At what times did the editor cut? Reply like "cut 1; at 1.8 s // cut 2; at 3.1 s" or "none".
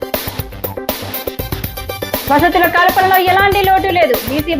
none